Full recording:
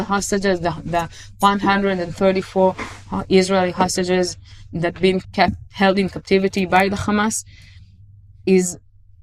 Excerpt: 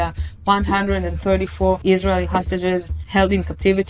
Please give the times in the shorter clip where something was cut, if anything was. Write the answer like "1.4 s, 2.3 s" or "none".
1.8 s, 3.0 s